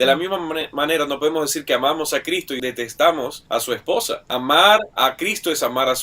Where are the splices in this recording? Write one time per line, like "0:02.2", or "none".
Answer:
0:02.5
0:04.2